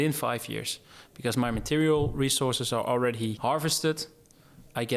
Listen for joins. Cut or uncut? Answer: cut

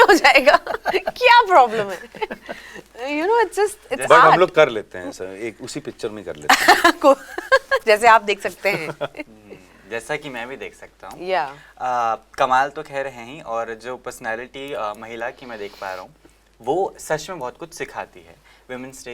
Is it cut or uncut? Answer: uncut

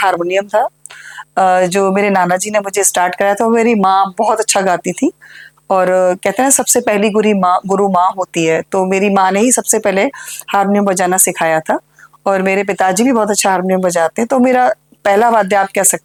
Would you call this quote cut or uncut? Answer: uncut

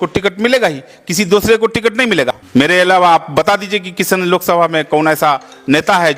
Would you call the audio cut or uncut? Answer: cut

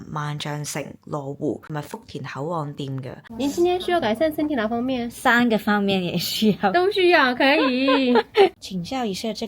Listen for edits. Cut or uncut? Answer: cut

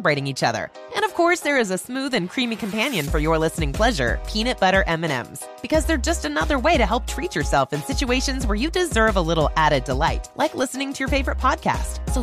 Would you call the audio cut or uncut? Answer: uncut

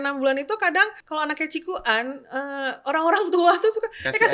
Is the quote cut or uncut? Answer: cut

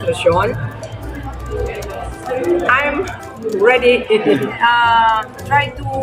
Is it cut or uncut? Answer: cut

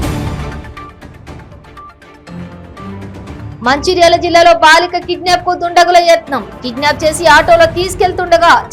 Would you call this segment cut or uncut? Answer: cut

